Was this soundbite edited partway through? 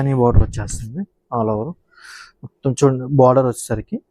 no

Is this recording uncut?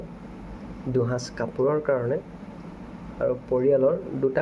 yes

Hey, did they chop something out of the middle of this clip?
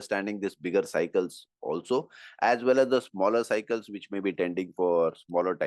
no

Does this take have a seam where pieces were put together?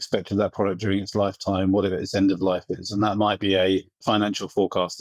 yes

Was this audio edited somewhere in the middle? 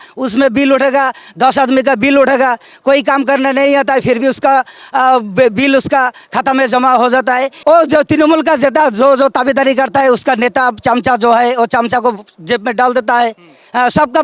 yes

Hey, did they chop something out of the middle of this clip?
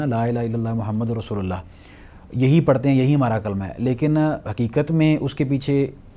no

